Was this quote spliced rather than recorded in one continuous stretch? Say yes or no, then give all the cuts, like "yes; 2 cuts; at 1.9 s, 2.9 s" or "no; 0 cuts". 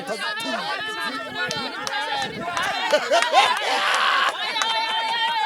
no; 0 cuts